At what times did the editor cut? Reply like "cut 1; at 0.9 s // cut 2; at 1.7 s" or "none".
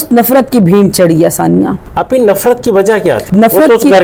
none